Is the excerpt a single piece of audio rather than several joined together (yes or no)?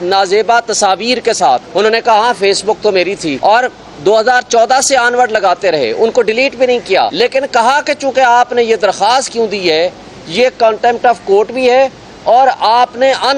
no